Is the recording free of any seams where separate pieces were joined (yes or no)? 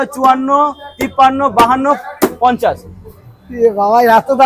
yes